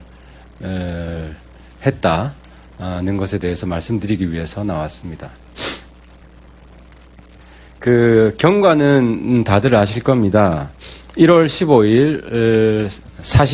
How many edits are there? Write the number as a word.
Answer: zero